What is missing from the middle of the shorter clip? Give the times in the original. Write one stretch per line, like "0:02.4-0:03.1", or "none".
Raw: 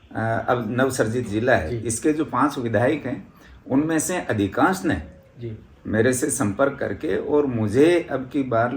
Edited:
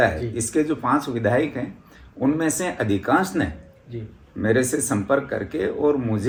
none